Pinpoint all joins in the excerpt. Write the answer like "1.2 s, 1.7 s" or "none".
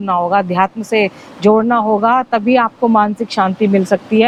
none